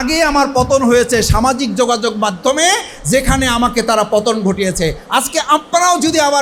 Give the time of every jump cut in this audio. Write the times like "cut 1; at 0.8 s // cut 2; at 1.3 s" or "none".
none